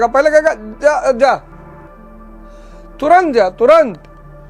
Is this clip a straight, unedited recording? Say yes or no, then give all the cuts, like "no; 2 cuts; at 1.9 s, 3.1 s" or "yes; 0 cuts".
yes; 0 cuts